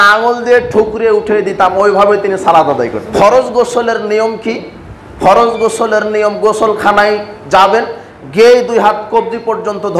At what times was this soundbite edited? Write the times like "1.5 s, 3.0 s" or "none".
3.0 s